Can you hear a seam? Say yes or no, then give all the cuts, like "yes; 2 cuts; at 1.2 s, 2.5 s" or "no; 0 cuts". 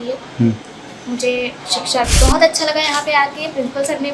yes; 1 cut; at 2.2 s